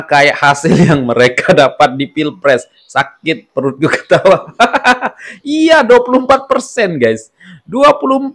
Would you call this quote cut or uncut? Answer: uncut